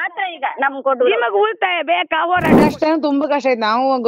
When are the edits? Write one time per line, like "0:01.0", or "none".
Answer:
0:02.6